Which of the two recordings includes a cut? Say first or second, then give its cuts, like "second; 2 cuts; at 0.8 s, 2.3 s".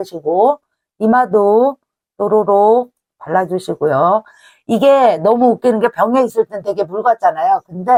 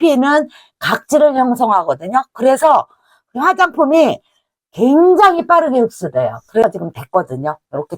second; 1 cut; at 6.6 s